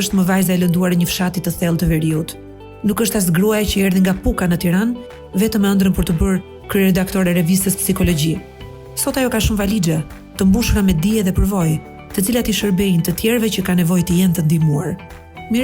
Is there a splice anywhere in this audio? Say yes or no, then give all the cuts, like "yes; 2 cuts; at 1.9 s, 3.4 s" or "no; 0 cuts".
no; 0 cuts